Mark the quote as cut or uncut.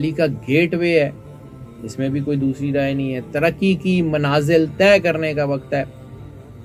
uncut